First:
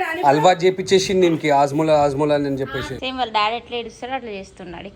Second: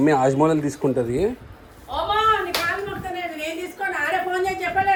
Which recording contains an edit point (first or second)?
first